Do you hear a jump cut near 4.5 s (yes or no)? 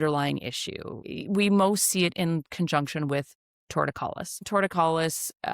yes